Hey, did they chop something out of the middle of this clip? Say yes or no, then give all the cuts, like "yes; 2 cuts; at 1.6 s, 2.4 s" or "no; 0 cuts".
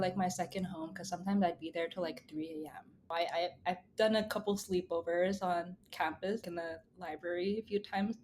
yes; 2 cuts; at 3.1 s, 6.4 s